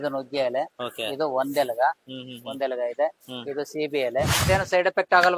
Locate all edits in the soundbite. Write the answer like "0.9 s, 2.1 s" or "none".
4.4 s